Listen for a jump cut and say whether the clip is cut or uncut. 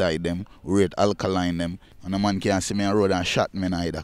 cut